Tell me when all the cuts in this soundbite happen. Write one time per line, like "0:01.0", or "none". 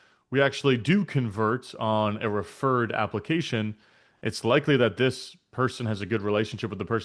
none